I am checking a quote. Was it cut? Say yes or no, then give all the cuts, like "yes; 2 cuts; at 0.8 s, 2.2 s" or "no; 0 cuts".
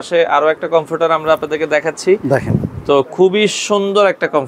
no; 0 cuts